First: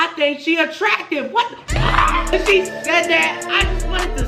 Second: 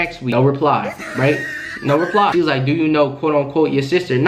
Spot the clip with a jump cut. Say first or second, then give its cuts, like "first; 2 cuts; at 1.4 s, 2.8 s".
second; 1 cut; at 2.3 s